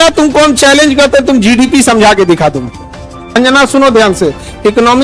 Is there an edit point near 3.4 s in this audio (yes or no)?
yes